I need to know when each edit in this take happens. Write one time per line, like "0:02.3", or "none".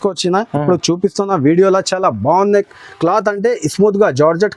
none